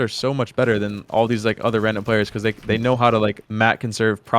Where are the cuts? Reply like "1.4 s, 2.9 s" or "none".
3.4 s